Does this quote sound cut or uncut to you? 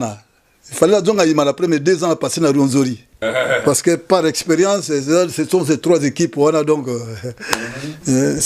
cut